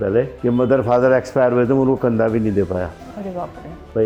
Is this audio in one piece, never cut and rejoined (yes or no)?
yes